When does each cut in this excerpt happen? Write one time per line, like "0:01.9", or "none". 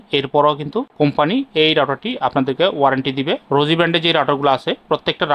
0:03.4